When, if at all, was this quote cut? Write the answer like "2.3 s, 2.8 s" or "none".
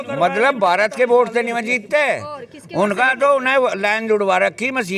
none